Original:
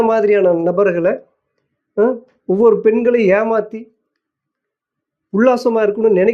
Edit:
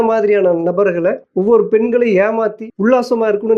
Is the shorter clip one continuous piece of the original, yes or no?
no